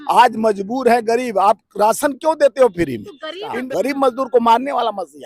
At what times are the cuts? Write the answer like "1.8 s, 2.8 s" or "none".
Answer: 3.5 s